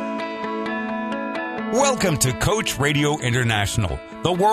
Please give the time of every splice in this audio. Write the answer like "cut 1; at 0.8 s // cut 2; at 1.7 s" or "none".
cut 1; at 1.7 s